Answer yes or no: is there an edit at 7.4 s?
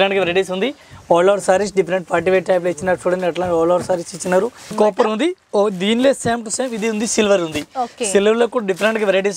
no